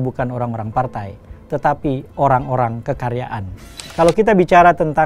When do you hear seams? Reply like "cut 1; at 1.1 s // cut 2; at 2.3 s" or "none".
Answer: cut 1; at 3.8 s